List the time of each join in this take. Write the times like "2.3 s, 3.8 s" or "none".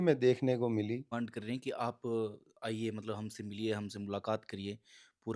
1.1 s